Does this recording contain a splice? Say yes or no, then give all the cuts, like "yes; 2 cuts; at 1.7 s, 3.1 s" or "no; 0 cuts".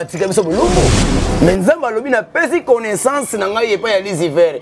yes; 1 cut; at 1.0 s